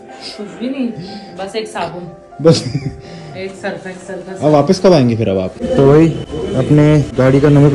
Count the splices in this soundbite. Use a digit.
2